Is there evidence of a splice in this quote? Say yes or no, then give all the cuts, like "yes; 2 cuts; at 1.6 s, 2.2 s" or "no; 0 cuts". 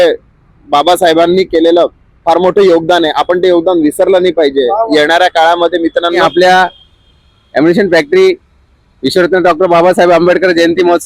yes; 1 cut; at 6.2 s